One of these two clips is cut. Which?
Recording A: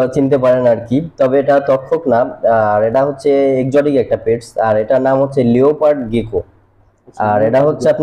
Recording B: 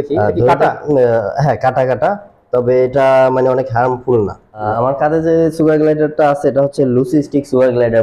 B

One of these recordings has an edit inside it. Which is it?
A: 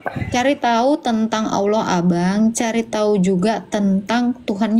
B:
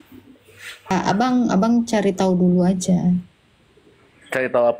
B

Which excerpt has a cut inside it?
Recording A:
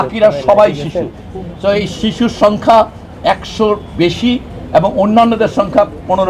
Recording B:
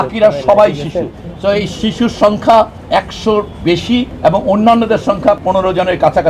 B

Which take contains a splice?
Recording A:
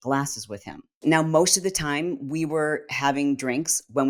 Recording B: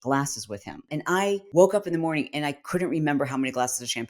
B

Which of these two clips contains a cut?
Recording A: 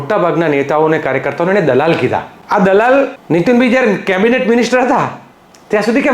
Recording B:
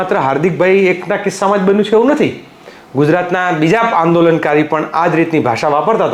A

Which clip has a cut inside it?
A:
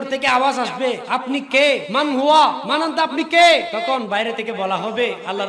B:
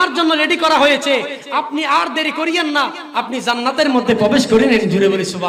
A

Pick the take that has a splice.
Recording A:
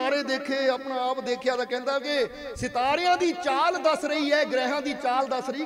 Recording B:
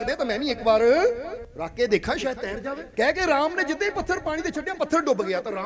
B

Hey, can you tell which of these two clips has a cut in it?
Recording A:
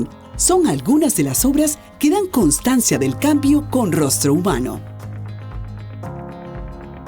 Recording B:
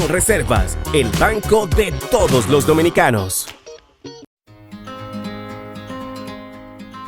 B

